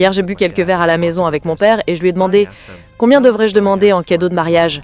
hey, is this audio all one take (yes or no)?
yes